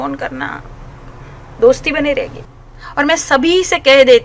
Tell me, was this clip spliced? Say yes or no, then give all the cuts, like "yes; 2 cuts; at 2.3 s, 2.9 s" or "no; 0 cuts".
yes; 1 cut; at 2.4 s